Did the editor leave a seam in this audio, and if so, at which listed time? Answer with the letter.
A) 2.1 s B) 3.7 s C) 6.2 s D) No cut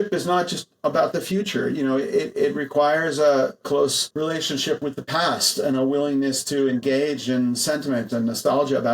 B